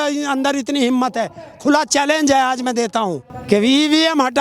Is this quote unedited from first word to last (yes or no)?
no